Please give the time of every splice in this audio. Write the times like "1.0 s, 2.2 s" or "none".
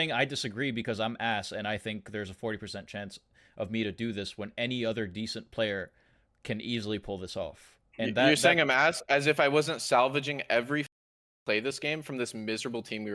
none